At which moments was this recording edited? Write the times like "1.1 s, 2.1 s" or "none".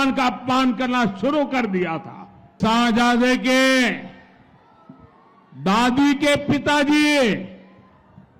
2.5 s